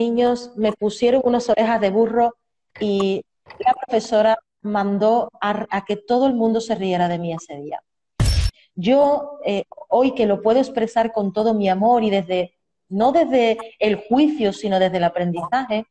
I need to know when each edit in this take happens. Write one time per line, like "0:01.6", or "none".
0:08.3